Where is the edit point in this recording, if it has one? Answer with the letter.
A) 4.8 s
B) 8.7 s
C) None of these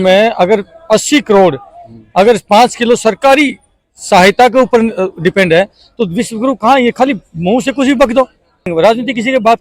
B